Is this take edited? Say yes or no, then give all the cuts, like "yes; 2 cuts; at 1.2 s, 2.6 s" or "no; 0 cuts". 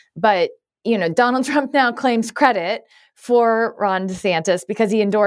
no; 0 cuts